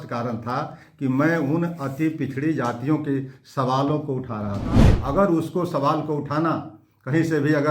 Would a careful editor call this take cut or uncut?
cut